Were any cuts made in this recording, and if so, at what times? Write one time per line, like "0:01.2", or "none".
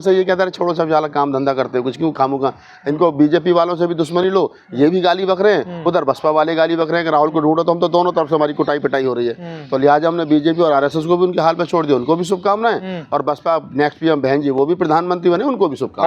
none